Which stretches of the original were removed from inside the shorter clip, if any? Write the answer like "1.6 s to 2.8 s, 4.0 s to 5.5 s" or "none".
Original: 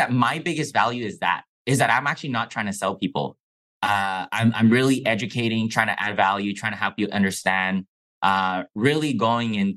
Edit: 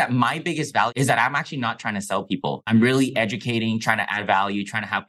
0.9 s to 1.6 s, 3.4 s to 4.6 s